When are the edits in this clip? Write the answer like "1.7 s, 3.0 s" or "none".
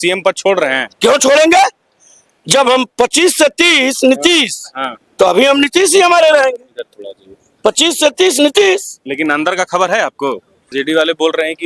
10.5 s